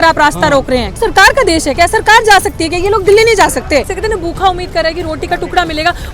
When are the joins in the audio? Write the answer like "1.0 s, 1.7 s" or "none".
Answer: 1.0 s, 3.9 s